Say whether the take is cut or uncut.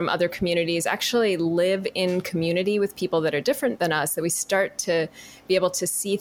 cut